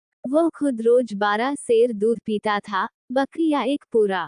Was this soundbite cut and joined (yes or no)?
yes